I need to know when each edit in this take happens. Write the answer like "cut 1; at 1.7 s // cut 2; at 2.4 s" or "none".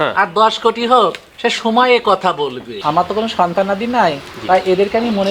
cut 1; at 2.8 s